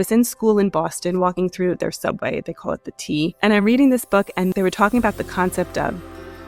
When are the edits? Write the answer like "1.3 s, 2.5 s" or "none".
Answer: 3.3 s, 4.5 s